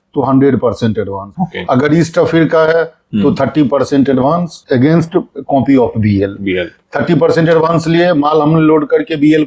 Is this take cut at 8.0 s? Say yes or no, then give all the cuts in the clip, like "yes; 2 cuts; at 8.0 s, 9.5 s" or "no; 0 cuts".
no; 3 cuts; at 1.2 s, 4.5 s, 5.4 s